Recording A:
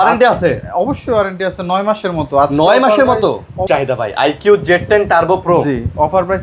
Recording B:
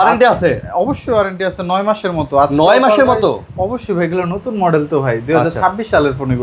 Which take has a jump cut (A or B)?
A